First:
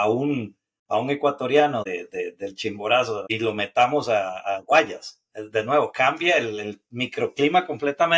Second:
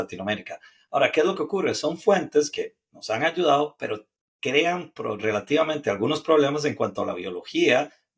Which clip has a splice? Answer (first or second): first